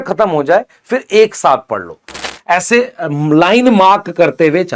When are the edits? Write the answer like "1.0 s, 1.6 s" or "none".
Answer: 2.1 s